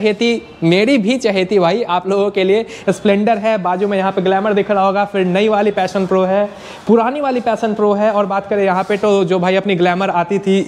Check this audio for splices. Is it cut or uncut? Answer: uncut